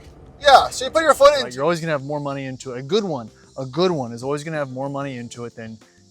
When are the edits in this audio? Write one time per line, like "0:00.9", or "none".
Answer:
0:01.5